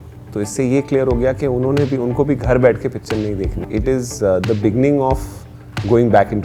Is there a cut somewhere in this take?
yes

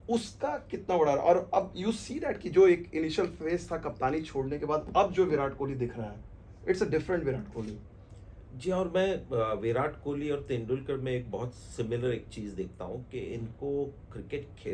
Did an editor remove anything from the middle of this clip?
no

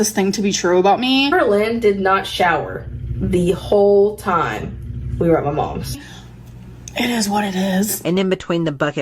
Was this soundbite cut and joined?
no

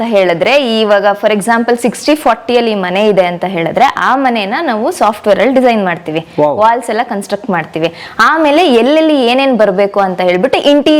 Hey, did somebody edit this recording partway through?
no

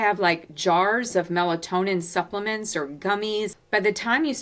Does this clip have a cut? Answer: yes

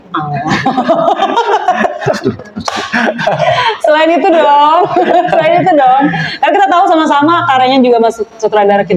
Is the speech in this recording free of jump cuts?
yes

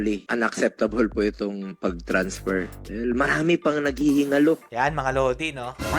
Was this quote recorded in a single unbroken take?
yes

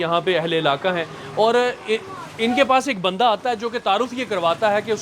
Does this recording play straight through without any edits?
yes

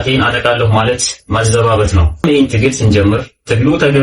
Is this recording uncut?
no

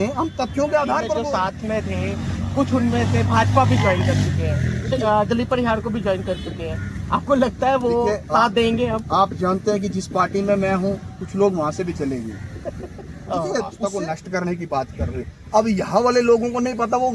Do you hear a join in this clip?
yes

